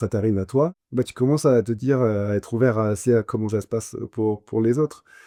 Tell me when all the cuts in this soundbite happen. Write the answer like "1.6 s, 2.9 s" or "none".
none